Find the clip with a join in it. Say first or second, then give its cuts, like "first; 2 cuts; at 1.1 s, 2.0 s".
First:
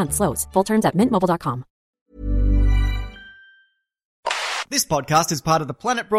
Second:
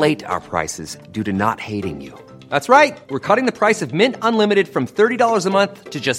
first; 2 cuts; at 2.1 s, 4.2 s